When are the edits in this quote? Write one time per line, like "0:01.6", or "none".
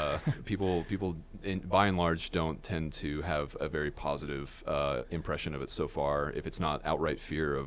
none